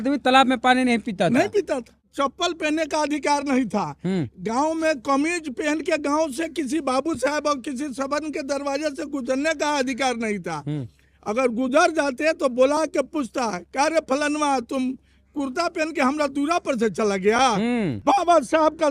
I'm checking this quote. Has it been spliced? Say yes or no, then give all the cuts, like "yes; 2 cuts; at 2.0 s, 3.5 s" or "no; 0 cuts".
yes; 2 cuts; at 2.1 s, 18.0 s